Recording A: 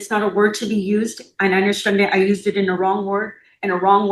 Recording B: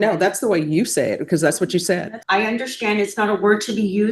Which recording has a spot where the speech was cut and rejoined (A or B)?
B